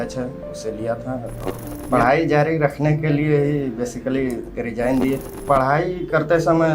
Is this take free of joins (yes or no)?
no